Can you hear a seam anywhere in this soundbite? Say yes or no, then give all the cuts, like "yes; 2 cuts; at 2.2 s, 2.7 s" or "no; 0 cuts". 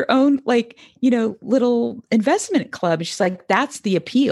no; 0 cuts